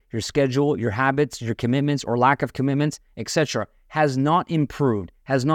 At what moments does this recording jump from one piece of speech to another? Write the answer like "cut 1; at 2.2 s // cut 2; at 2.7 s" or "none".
none